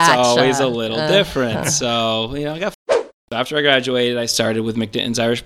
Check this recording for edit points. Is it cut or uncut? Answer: cut